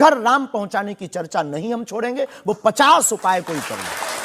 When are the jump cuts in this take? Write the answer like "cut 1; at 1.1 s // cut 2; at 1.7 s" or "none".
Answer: none